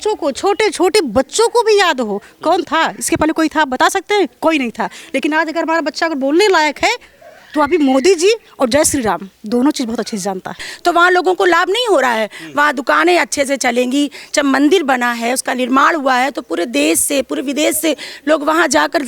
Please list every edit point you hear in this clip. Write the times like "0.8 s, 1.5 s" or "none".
10.7 s